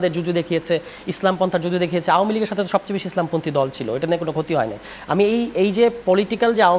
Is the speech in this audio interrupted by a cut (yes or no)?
no